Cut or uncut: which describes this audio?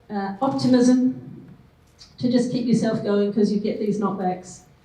uncut